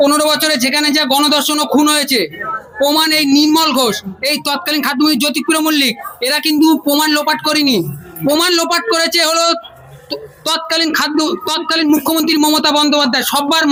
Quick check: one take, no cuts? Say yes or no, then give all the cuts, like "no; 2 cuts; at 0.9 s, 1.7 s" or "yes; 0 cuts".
yes; 0 cuts